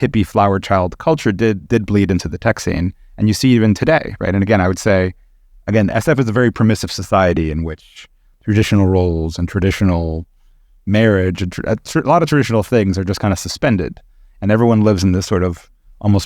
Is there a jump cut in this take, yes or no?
no